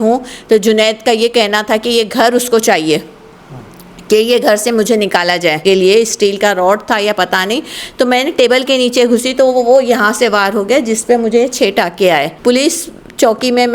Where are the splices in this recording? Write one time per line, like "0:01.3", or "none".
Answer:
0:05.6
0:12.3